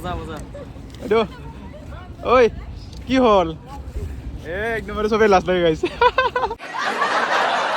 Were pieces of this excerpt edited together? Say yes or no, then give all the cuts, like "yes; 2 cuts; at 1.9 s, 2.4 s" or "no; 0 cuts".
yes; 1 cut; at 6.7 s